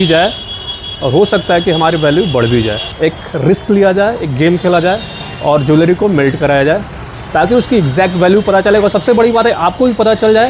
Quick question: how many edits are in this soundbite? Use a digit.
1